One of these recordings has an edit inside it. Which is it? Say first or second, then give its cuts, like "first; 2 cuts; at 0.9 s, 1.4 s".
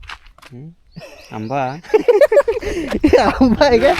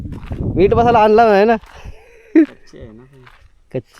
first; 1 cut; at 2.7 s